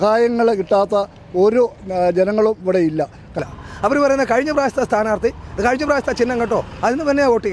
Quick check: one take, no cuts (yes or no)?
no